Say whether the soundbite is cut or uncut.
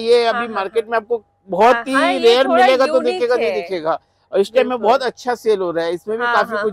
uncut